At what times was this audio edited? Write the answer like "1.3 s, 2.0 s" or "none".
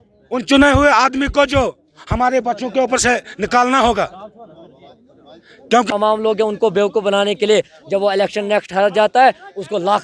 5.9 s